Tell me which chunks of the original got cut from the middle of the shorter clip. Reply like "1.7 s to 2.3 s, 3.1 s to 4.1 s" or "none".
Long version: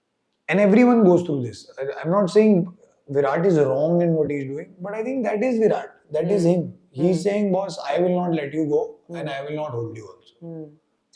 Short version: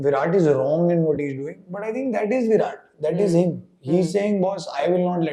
none